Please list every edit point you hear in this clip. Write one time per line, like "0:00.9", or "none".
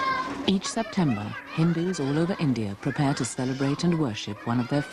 none